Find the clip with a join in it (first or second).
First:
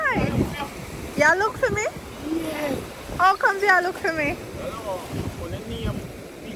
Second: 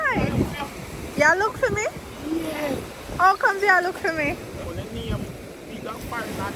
second